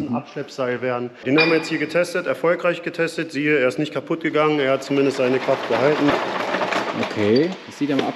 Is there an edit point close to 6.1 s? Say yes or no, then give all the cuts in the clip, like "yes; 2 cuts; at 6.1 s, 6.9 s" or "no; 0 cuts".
yes; 2 cuts; at 1.2 s, 6.1 s